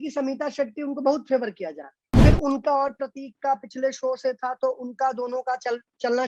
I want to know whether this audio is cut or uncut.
cut